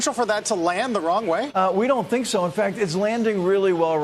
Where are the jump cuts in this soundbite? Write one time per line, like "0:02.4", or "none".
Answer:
0:01.5